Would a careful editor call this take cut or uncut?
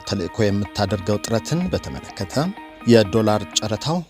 cut